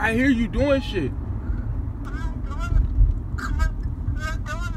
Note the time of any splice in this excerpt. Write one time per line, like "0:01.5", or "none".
none